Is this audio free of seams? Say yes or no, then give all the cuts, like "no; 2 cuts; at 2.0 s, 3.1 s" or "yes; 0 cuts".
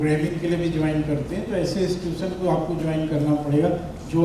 yes; 0 cuts